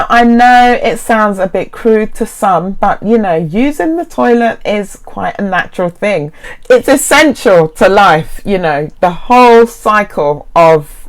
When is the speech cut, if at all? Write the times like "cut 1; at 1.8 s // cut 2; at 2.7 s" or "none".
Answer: cut 1; at 6.5 s